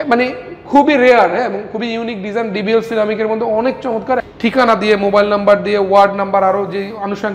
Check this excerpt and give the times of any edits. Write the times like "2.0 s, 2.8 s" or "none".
4.3 s